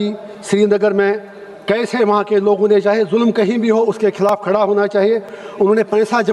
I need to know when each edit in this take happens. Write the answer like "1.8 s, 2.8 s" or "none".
none